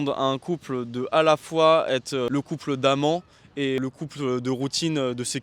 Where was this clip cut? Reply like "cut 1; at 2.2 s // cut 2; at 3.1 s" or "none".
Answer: cut 1; at 2.3 s // cut 2; at 3.8 s